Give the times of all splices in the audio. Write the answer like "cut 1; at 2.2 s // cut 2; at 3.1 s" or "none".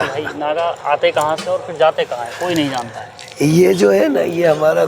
none